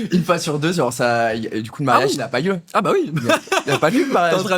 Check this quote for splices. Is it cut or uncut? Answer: uncut